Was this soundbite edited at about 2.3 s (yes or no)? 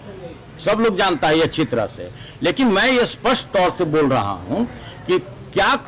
no